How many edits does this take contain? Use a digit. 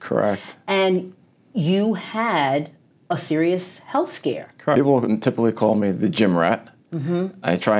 1